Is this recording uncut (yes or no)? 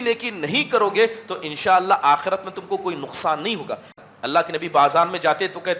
no